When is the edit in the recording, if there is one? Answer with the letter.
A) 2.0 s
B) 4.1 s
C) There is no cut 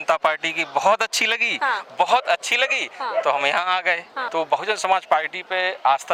B